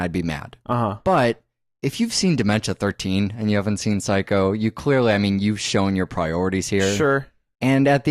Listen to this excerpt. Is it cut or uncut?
uncut